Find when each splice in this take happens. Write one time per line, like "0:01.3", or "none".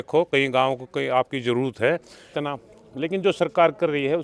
0:02.3

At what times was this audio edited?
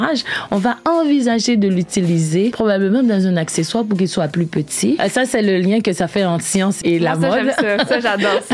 0:02.6
0:05.0
0:06.8

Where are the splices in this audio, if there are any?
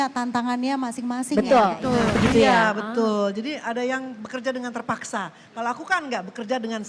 0:02.2

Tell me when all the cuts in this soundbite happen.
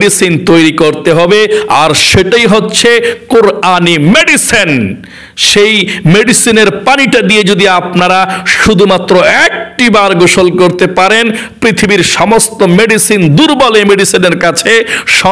none

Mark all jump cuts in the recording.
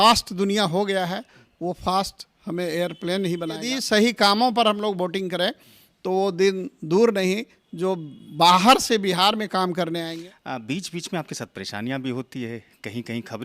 0:03.7
0:10.1

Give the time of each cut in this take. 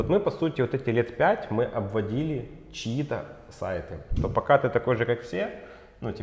0:04.1

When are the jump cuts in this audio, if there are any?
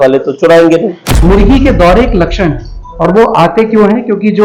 0:01.0

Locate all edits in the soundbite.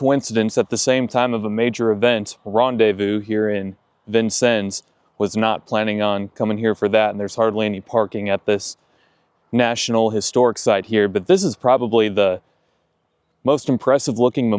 none

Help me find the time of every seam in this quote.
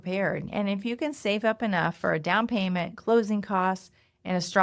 none

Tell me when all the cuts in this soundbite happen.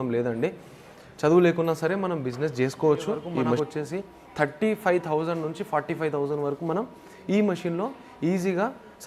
0:03.6

